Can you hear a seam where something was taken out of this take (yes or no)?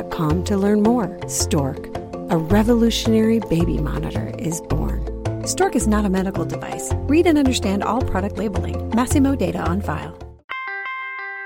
yes